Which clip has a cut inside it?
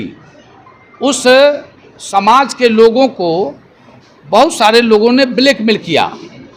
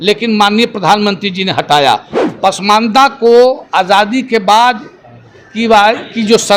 second; 1 cut; at 2.2 s

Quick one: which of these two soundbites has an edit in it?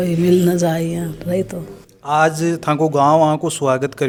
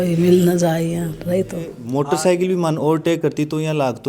second; 1 cut; at 1.8 s

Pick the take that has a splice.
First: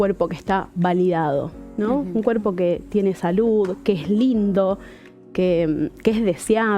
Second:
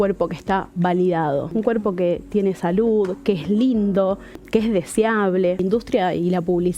second; 3 cuts; at 1.5 s, 4.4 s, 5.6 s

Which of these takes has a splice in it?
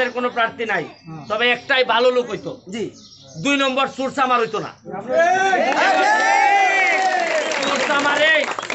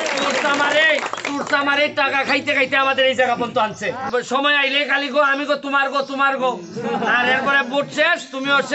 second; 1 cut; at 4.1 s

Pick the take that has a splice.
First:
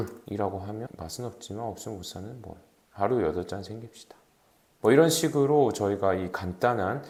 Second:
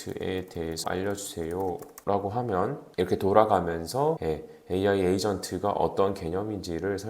second; 4 cuts; at 0.8 s, 1.9 s, 2.8 s, 4.2 s

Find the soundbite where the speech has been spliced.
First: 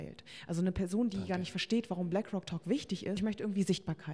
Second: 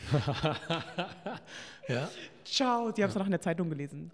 first; 1 cut; at 3.2 s

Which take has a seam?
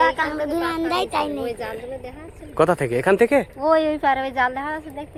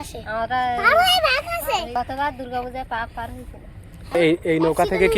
second; 2 cuts; at 2.0 s, 4.1 s

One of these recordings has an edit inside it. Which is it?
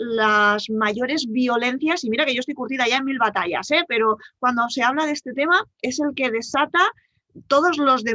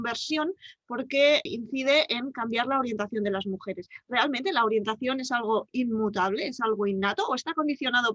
second; 1 cut; at 1.4 s

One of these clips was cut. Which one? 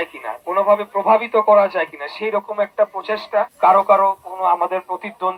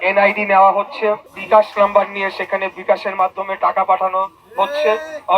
second; 1 cut; at 1.3 s

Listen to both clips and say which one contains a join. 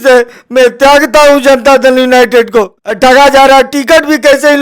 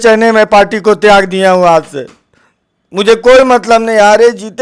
first; 1 cut; at 2.8 s

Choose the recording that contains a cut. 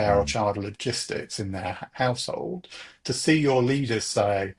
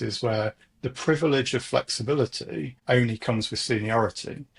second; 1 cut; at 2.7 s

